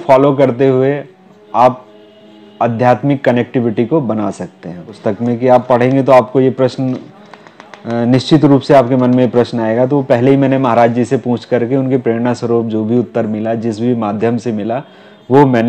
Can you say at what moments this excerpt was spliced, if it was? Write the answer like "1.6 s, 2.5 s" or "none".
4.9 s